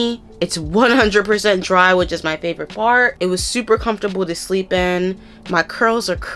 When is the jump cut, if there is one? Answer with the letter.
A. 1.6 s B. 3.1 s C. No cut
B